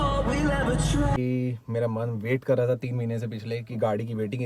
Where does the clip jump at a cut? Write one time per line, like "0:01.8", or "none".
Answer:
0:01.2